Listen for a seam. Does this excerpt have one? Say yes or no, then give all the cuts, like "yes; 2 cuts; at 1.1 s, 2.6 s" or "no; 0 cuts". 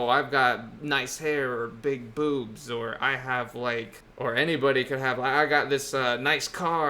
yes; 1 cut; at 4.0 s